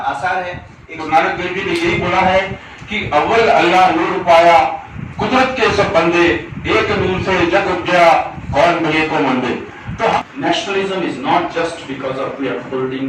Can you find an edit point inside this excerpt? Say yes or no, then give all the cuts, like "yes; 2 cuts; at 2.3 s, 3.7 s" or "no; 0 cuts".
yes; 2 cuts; at 1.0 s, 10.2 s